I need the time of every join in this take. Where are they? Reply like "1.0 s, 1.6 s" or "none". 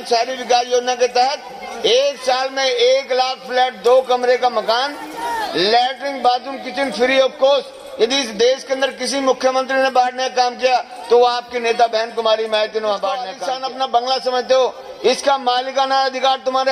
13.3 s

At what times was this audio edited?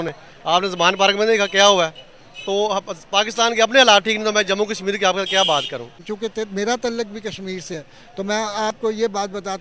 6.0 s

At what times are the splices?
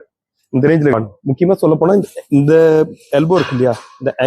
0.9 s

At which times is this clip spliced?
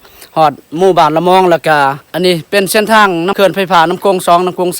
2.0 s, 3.3 s

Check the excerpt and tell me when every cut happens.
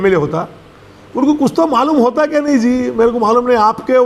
none

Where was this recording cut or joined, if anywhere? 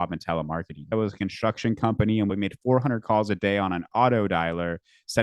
0.9 s, 2.3 s

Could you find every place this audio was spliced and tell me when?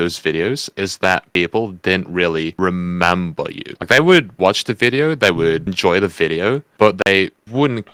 none

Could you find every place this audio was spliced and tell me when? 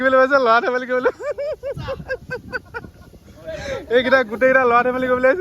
none

